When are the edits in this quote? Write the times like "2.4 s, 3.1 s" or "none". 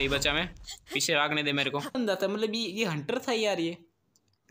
2.0 s